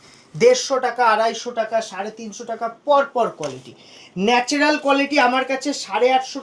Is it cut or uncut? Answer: uncut